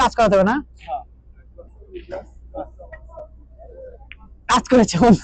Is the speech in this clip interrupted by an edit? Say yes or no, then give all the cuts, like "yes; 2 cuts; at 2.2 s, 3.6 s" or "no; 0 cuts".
no; 0 cuts